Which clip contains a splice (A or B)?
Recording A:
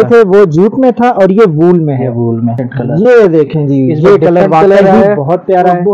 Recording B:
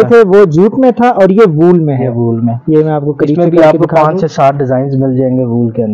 A